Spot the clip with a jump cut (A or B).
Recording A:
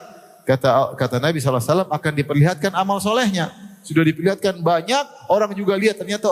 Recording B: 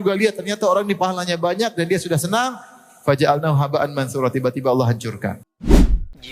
B